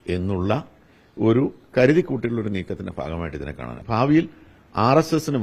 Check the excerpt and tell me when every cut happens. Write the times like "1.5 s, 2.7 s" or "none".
3.8 s